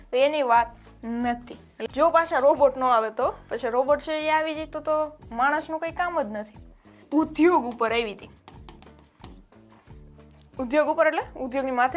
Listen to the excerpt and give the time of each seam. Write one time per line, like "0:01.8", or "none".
0:01.8
0:07.0